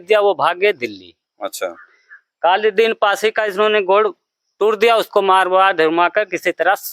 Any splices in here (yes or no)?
no